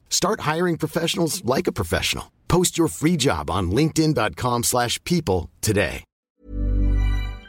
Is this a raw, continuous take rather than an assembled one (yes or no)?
no